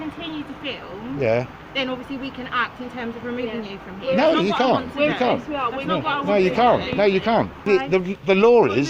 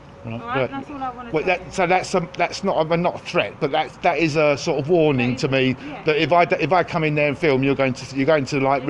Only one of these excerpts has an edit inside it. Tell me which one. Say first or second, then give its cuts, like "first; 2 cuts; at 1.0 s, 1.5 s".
first; 1 cut; at 7.6 s